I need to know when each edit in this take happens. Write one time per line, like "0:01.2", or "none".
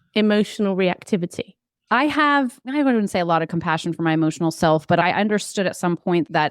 0:01.9
0:02.6